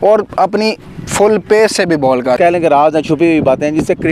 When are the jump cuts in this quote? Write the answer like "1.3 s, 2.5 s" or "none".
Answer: 2.4 s

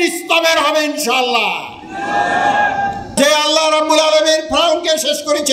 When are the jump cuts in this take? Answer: 3.1 s

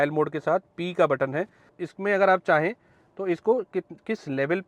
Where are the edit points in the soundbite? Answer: 1.8 s

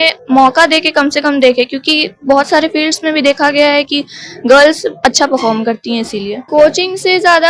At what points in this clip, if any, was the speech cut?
none

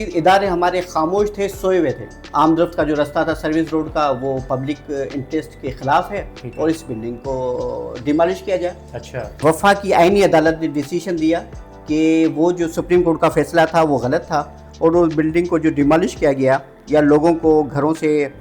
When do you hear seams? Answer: 2.1 s, 9.3 s

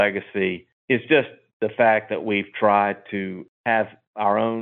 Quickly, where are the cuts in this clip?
none

